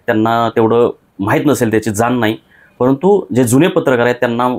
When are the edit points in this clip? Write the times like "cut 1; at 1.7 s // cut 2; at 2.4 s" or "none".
none